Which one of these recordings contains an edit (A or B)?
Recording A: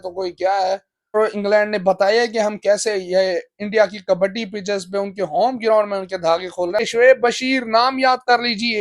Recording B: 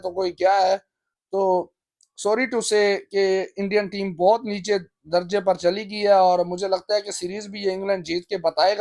A